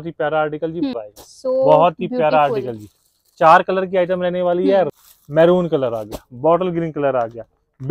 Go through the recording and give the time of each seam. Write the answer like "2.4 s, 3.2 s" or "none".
0.9 s, 4.9 s